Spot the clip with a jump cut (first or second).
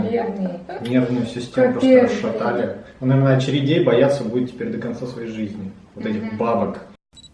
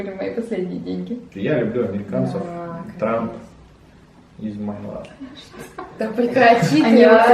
second